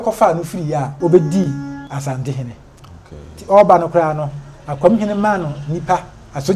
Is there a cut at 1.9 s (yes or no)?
yes